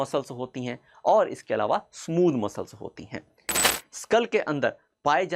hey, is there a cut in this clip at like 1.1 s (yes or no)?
no